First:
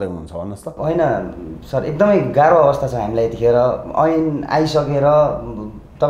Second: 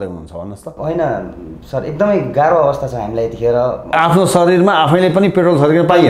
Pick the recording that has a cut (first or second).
second